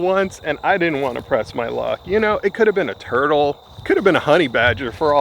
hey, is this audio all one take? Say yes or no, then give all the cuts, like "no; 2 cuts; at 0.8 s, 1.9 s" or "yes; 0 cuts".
yes; 0 cuts